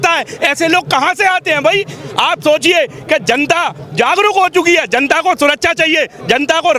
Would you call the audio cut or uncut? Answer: uncut